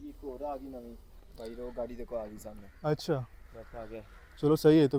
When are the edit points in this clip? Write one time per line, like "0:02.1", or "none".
none